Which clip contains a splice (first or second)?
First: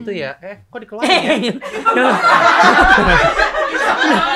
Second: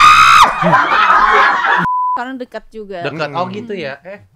second